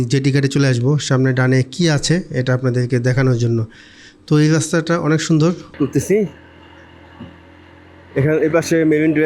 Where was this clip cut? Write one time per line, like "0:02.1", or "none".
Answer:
0:05.7